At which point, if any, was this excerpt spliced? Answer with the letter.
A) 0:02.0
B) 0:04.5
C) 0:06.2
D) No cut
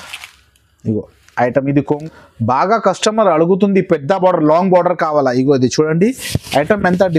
A